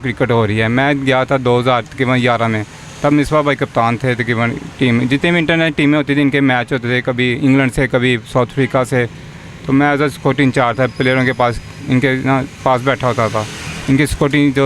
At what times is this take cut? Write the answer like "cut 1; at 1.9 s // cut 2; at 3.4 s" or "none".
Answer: none

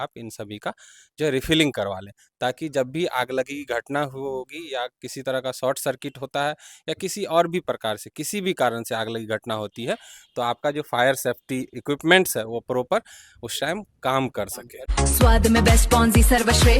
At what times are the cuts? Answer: cut 1; at 14.9 s

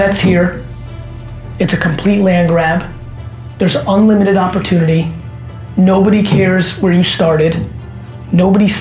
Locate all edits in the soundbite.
none

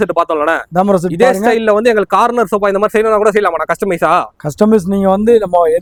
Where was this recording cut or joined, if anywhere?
none

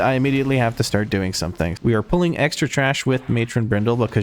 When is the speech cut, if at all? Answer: cut 1; at 1.8 s

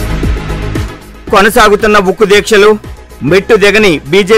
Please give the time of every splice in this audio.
cut 1; at 1.0 s

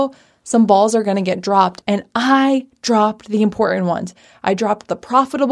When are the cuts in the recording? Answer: cut 1; at 1.8 s

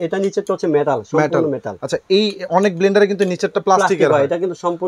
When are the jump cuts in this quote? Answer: none

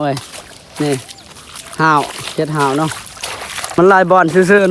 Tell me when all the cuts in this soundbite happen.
cut 1; at 3.8 s

